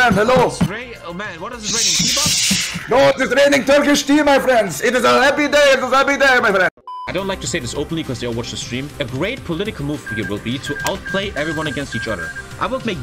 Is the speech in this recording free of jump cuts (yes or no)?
no